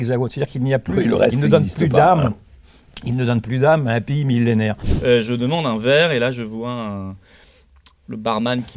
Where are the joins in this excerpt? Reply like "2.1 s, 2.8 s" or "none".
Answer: 4.9 s